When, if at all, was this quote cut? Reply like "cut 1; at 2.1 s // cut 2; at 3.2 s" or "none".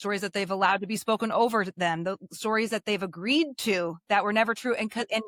none